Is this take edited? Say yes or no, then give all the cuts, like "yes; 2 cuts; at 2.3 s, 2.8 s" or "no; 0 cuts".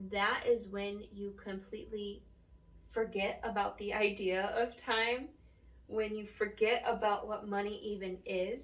no; 0 cuts